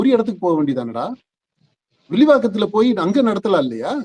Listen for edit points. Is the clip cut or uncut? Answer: uncut